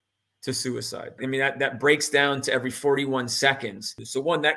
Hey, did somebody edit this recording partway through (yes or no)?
no